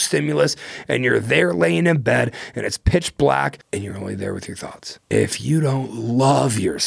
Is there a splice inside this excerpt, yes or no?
yes